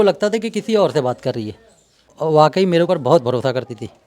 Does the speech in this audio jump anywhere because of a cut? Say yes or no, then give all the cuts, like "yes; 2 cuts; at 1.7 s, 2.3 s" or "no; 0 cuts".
yes; 1 cut; at 2.0 s